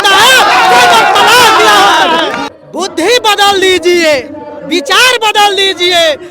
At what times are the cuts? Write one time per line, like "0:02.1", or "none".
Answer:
0:02.5